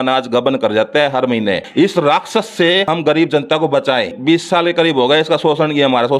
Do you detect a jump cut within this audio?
yes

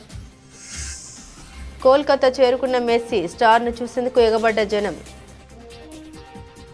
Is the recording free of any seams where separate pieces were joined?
yes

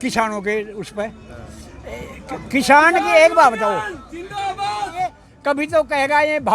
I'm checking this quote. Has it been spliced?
yes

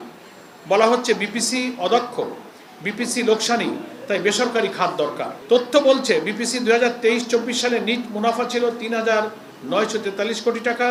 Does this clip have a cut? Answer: no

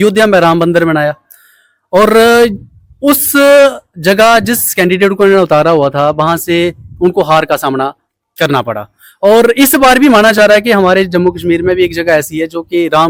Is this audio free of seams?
yes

